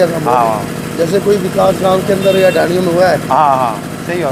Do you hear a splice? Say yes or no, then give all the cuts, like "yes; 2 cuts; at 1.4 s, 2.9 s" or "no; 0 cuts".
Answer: no; 0 cuts